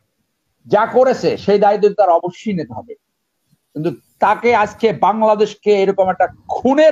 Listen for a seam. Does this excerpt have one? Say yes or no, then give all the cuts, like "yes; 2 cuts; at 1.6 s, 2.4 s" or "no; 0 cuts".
no; 0 cuts